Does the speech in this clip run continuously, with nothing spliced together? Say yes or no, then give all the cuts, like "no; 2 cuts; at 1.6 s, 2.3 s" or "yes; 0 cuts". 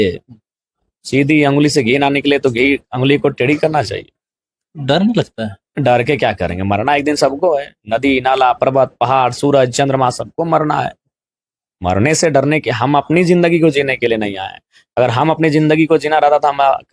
yes; 0 cuts